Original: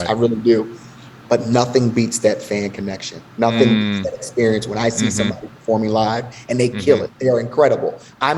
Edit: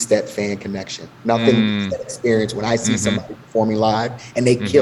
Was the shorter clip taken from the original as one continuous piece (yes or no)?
yes